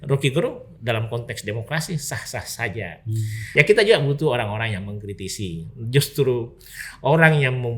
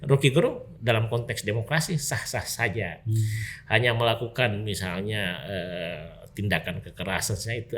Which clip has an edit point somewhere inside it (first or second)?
first